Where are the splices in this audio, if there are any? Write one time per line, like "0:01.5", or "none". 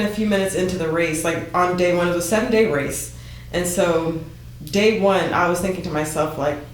none